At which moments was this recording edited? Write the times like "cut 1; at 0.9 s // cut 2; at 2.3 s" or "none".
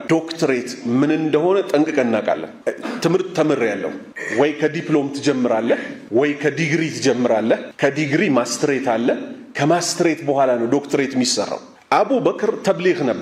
none